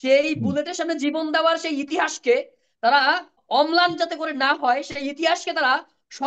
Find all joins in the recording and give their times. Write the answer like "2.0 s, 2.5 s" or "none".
3.4 s